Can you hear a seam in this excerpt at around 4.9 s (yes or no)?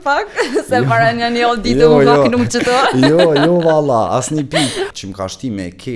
yes